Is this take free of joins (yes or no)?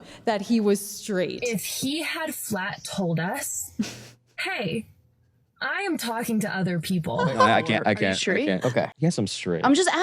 no